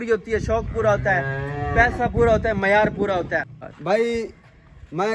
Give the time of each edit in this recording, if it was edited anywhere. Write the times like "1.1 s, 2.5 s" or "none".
none